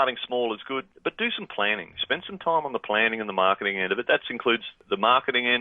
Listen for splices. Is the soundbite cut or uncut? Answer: cut